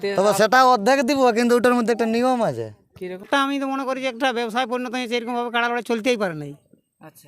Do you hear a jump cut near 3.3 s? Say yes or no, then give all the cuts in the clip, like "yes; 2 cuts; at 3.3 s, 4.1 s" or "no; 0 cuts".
yes; 1 cut; at 3.3 s